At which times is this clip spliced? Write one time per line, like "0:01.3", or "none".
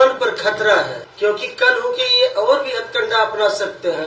0:01.0